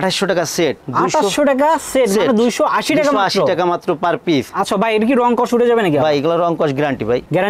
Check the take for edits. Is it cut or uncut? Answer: uncut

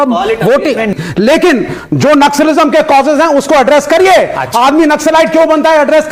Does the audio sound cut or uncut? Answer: cut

